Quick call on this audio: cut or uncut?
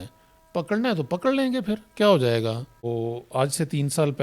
cut